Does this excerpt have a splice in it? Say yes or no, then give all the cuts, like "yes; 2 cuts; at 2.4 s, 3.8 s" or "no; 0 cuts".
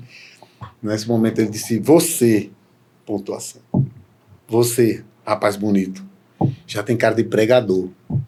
no; 0 cuts